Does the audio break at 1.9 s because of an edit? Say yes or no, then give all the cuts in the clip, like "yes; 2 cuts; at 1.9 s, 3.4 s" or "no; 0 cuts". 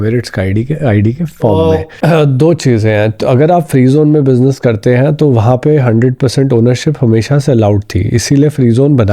yes; 1 cut; at 1.9 s